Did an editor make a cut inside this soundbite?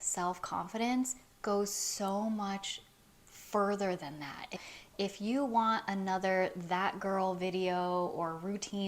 yes; 1 cut; at 4.6 s

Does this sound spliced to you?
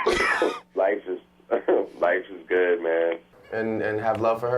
yes; 1 cut; at 3.4 s

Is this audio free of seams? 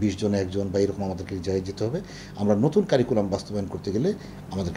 yes; 0 cuts

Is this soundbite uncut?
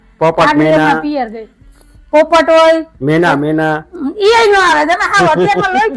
yes; 0 cuts

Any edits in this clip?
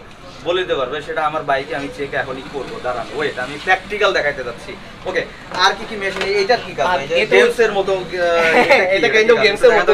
no; 0 cuts

